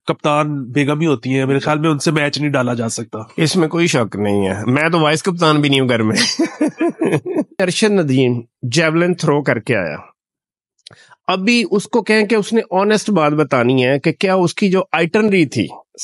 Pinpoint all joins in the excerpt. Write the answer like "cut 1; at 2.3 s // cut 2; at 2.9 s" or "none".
cut 1; at 7.6 s